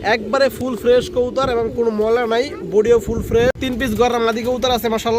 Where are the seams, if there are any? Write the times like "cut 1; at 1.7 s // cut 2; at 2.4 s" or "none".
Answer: cut 1; at 3.6 s